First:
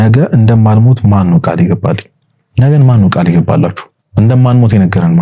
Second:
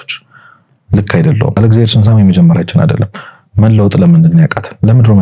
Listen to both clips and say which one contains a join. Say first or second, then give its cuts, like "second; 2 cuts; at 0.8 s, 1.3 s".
second; 1 cut; at 1.6 s